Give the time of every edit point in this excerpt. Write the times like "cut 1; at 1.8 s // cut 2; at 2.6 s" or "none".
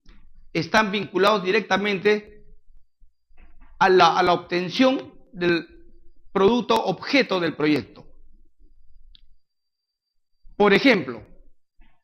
none